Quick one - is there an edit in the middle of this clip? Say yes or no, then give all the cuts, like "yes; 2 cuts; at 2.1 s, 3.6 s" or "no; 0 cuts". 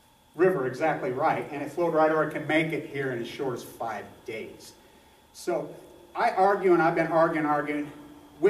yes; 1 cut; at 7.3 s